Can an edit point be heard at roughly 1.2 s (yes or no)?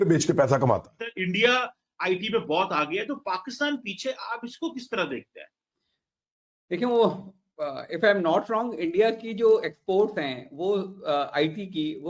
yes